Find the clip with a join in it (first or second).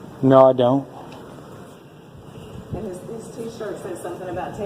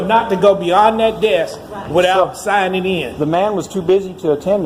first